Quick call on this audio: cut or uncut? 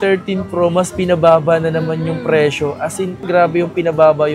uncut